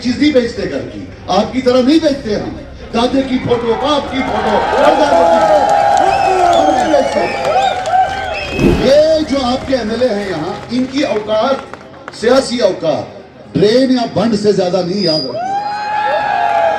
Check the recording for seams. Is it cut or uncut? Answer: cut